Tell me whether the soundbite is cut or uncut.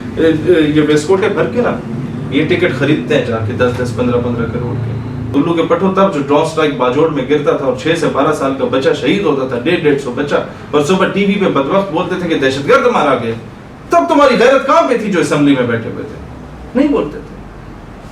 cut